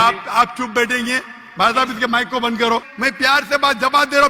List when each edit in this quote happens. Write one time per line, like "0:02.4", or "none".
0:02.9